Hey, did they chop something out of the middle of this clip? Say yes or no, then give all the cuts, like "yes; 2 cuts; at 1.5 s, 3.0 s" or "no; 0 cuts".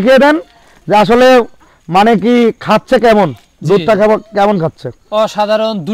no; 0 cuts